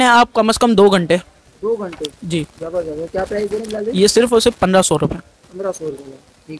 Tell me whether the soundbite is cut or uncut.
uncut